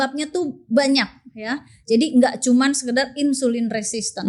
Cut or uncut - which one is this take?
uncut